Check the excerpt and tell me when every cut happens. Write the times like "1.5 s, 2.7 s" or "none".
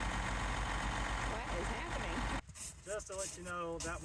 2.4 s